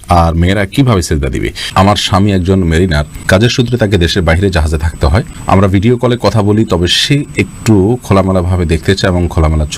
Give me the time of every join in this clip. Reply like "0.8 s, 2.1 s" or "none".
1.6 s, 3.1 s, 5.3 s